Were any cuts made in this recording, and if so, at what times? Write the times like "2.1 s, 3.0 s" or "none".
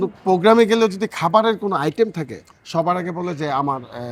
none